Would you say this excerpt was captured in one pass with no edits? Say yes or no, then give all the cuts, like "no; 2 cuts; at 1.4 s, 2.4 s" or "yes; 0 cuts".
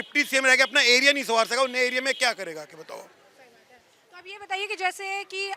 yes; 0 cuts